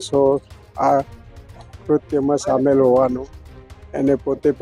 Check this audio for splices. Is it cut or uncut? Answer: uncut